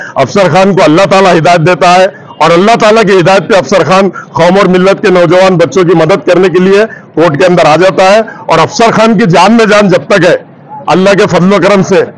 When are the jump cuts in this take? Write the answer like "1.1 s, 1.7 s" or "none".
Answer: none